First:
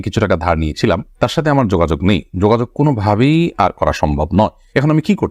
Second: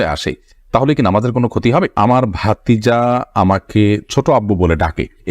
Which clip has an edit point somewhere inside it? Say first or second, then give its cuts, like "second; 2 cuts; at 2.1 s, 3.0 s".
second; 1 cut; at 1.9 s